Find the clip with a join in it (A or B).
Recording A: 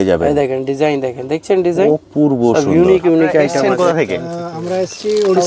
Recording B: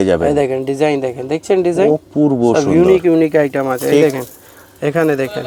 A